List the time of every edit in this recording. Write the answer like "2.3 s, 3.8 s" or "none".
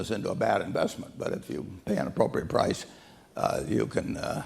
none